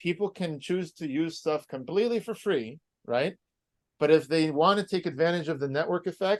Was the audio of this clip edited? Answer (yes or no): no